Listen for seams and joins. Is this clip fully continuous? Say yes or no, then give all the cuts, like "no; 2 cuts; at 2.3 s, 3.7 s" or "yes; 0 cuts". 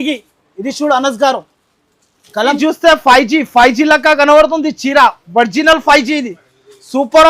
no; 1 cut; at 2.6 s